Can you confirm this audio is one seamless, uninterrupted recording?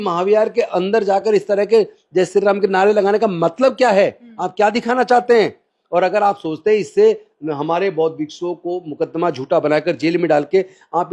yes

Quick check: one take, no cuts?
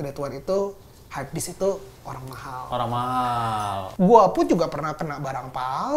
no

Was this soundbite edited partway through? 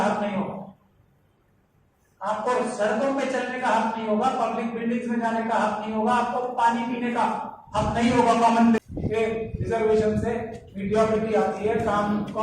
yes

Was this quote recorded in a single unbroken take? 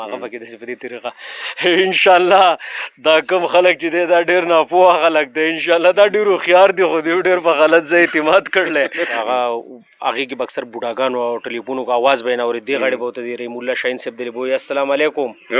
no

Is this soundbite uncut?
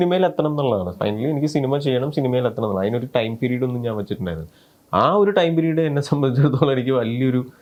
yes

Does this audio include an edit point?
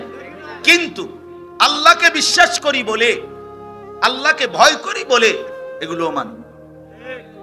no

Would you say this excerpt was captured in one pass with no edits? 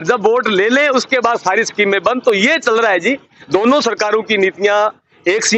yes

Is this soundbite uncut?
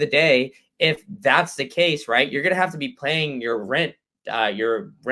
yes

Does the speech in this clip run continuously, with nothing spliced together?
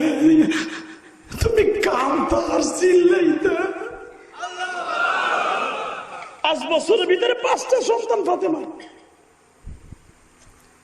no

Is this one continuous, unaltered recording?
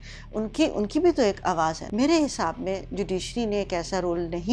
no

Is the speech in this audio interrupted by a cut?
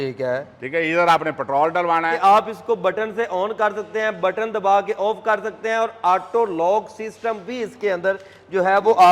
yes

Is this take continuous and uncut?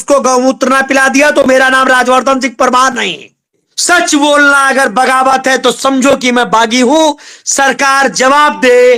no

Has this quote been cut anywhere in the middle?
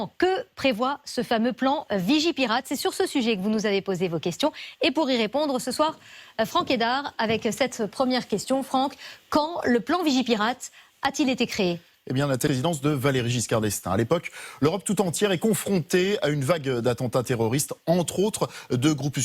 yes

